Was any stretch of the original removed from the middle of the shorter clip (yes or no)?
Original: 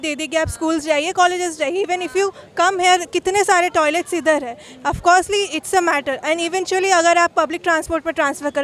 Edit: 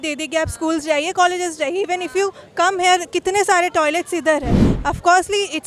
no